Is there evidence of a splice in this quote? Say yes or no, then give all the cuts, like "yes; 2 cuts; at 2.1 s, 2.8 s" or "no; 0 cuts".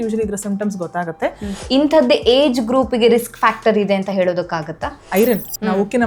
yes; 2 cuts; at 1.5 s, 5.1 s